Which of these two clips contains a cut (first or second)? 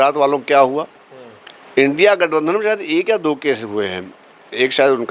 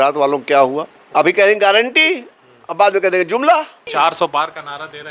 second